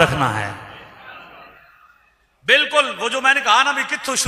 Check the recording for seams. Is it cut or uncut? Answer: uncut